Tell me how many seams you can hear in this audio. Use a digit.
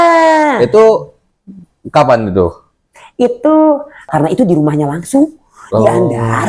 1